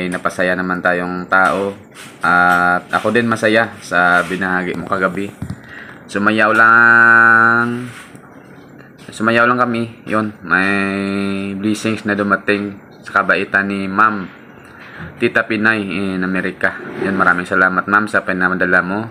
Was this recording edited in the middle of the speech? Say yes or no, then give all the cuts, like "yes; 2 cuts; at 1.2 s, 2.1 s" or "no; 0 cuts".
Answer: no; 0 cuts